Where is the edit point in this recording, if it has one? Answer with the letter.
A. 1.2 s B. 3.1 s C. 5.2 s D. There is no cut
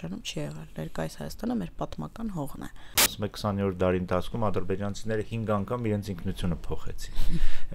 B